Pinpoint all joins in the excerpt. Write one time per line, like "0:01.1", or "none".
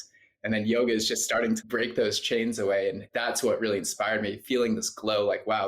0:01.6
0:03.1